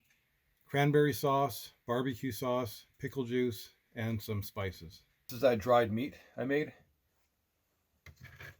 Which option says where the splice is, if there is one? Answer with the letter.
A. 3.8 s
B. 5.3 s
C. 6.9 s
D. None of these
B